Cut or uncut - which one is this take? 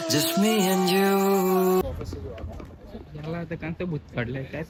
uncut